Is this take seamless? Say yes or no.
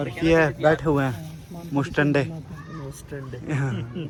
yes